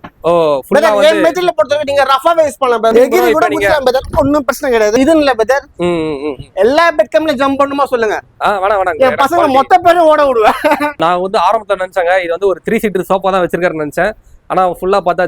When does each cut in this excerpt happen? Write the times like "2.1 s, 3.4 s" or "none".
2.9 s, 4.9 s, 11.0 s